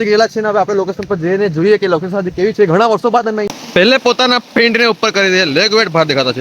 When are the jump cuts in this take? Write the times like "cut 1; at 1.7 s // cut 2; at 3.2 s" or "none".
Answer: cut 1; at 3.5 s